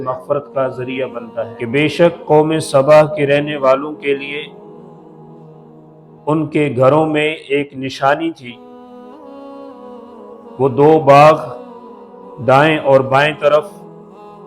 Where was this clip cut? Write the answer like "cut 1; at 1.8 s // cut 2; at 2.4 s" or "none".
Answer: cut 1; at 1.5 s